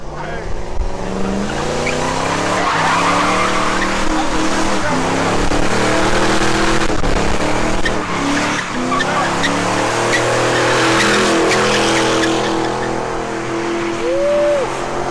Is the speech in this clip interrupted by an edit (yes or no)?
no